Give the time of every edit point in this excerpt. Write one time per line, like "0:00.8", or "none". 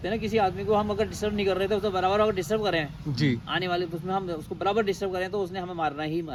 none